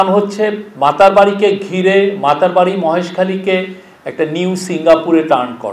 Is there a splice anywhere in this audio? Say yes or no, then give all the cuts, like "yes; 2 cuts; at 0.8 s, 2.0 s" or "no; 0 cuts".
no; 0 cuts